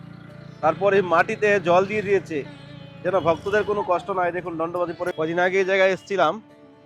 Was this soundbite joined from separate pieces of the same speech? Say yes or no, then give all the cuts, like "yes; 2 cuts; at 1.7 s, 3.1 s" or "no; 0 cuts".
yes; 1 cut; at 5.1 s